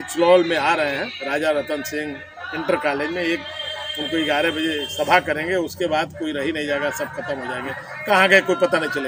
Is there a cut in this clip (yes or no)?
no